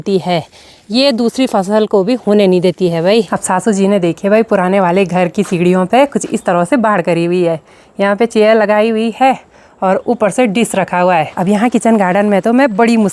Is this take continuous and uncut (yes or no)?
no